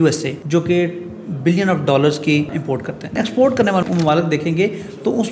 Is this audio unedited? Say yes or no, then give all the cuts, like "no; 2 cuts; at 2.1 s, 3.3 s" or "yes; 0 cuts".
no; 1 cut; at 3.1 s